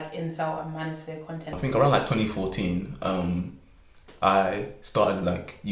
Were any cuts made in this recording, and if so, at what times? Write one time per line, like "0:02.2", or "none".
0:01.6